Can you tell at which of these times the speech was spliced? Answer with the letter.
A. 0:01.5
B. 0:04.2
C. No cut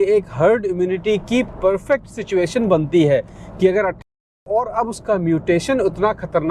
B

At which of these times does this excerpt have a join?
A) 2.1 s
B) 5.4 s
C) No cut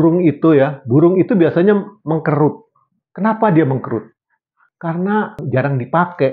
B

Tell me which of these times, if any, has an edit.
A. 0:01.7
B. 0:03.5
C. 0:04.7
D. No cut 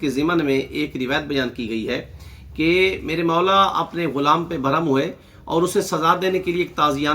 D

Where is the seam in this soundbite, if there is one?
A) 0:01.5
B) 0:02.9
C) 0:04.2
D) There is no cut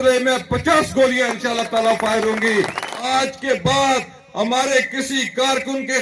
B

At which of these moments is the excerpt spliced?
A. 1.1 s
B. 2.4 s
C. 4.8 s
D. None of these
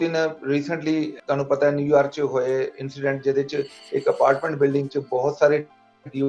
A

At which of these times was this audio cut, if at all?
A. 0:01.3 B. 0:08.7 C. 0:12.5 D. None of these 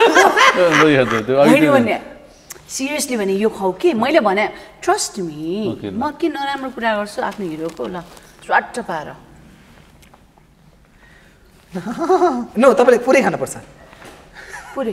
D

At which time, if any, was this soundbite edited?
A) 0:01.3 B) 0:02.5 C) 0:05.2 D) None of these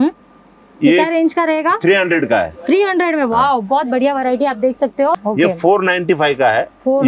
C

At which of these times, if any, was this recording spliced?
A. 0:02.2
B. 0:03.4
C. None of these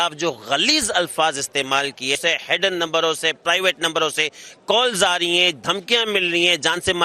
A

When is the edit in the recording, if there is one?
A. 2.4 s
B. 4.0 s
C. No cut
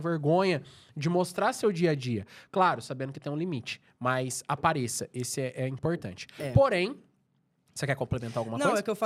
C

